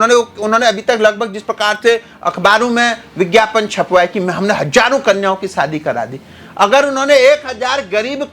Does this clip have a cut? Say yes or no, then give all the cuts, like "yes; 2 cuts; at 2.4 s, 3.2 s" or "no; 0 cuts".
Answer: no; 0 cuts